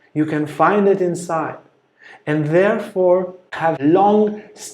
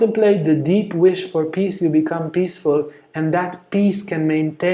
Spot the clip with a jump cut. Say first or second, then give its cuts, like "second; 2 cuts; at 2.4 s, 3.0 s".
first; 1 cut; at 3.6 s